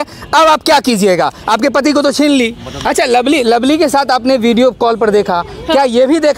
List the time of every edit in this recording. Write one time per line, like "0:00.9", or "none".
0:02.8